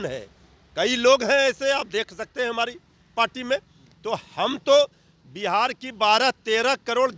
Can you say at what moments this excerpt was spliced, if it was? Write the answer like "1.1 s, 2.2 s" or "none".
none